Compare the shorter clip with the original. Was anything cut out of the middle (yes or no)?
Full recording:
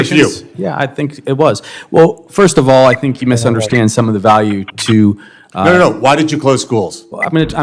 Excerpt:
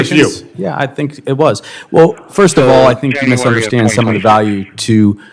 no